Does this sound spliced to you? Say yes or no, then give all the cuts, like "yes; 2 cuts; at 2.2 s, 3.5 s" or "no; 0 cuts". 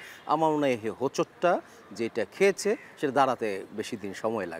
no; 0 cuts